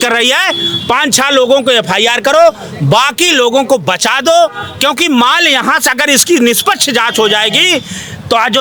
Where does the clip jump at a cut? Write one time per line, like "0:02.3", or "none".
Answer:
none